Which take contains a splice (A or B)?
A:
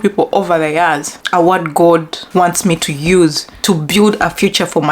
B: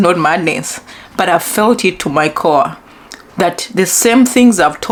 A